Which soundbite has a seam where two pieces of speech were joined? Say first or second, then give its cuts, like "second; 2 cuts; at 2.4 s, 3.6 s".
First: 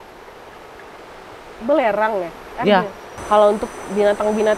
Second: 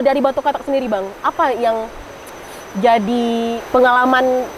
first; 1 cut; at 3.1 s